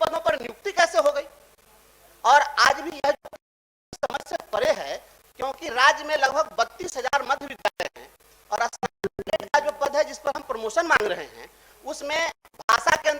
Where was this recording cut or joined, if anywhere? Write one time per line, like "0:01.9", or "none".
none